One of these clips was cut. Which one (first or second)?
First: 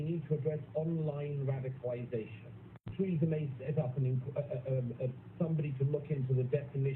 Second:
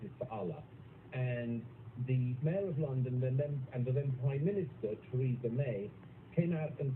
first